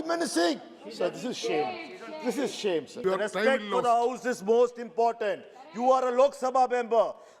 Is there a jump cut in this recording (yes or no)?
yes